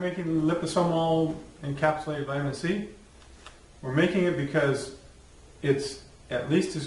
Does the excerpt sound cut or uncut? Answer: cut